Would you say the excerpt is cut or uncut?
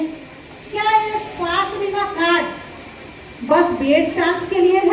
uncut